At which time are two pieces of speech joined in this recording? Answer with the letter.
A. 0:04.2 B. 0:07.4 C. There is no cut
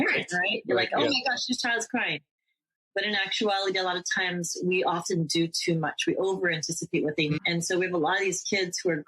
B